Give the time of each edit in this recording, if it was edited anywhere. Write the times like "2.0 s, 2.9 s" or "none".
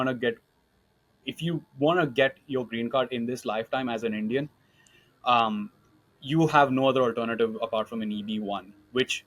none

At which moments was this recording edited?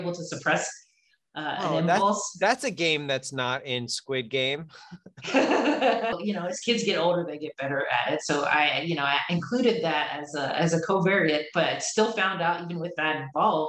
6.2 s

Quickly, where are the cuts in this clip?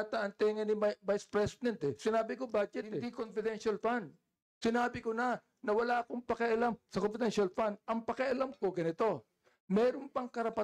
3.2 s

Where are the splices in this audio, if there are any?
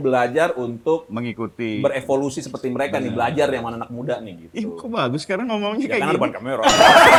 none

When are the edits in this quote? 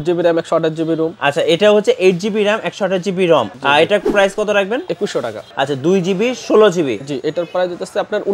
3.5 s, 5.4 s

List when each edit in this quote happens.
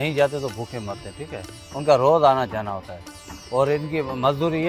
none

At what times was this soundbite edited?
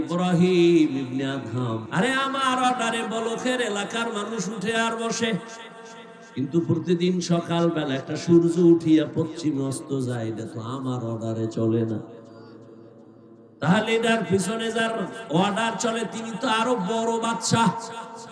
1.8 s

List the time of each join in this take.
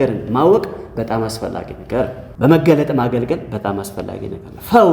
2.2 s

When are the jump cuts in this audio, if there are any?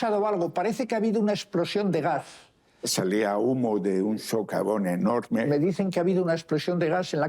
2.7 s, 5.5 s

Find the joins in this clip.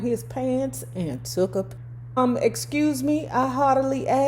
1.7 s

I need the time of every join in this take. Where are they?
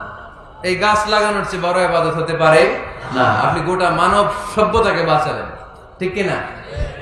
none

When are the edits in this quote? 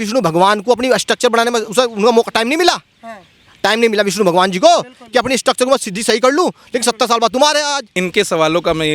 none

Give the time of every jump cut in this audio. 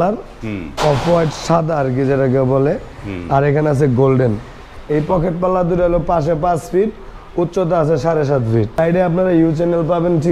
4.7 s, 8.8 s

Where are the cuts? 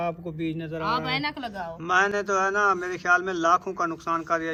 none

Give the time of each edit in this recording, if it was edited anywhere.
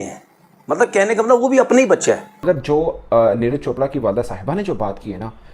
2.4 s

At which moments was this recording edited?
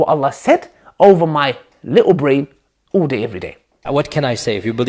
3.8 s

